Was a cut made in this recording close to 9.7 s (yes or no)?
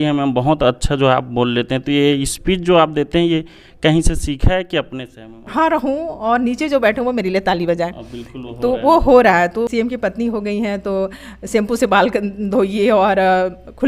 yes